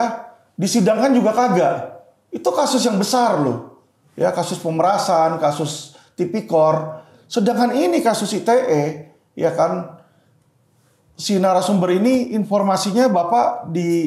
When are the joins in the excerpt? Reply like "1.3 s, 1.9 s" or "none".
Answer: none